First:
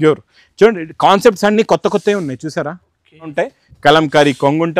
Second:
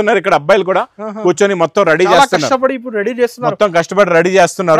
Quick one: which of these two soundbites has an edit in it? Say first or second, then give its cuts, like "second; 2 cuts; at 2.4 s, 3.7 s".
first; 1 cut; at 3.3 s